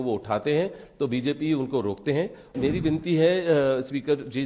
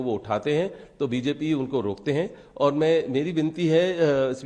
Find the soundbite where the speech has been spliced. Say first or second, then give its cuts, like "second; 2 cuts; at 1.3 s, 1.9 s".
first; 1 cut; at 2.5 s